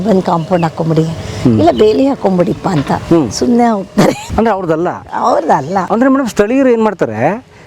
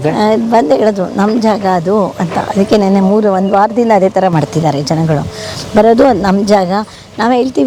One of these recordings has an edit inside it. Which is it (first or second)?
first